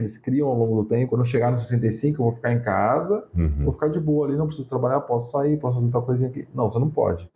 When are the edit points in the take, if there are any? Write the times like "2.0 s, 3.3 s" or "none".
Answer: 1.1 s